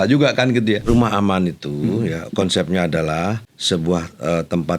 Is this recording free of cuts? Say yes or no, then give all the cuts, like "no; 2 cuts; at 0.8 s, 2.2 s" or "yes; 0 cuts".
no; 2 cuts; at 0.9 s, 3.5 s